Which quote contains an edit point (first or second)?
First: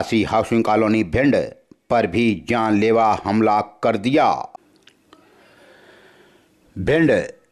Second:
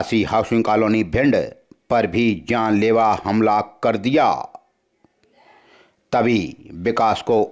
first